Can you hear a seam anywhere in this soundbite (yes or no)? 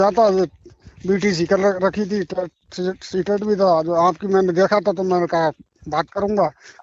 no